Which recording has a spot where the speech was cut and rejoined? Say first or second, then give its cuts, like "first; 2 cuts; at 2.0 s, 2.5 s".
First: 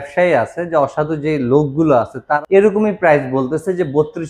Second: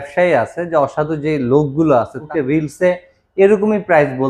first; 1 cut; at 2.2 s